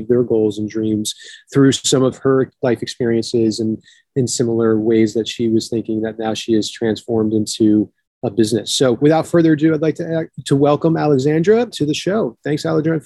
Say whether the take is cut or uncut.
cut